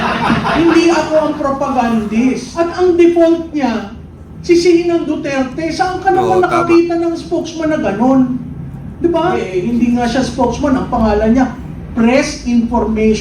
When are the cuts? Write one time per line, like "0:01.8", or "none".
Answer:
0:02.5
0:09.5